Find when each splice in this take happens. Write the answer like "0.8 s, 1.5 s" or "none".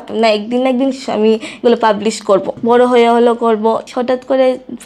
2.5 s, 3.9 s